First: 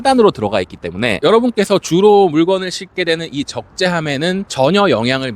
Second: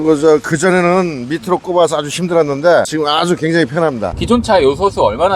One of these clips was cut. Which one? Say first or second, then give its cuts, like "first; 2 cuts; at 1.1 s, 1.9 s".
second; 1 cut; at 4.1 s